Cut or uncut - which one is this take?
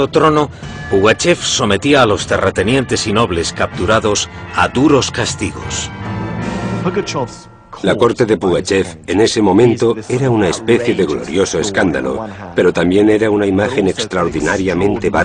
uncut